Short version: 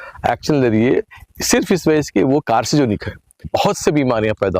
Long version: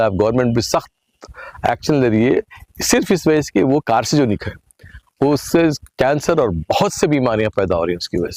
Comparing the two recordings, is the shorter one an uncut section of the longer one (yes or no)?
no